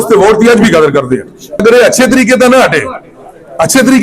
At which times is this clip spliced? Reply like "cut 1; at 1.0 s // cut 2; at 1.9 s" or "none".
cut 1; at 1.6 s